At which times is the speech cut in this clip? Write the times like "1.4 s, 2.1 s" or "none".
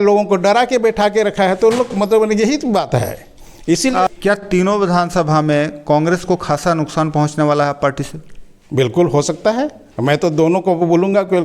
4.2 s